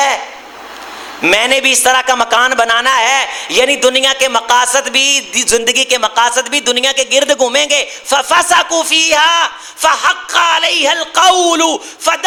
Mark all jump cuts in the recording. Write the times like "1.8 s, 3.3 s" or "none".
none